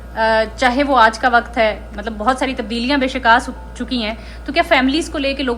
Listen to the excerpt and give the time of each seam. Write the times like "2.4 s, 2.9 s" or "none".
none